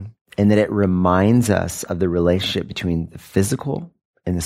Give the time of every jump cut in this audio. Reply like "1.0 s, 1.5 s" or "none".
none